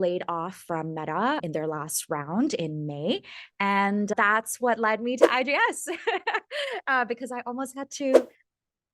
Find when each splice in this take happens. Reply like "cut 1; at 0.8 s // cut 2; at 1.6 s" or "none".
cut 1; at 1.4 s // cut 2; at 4.1 s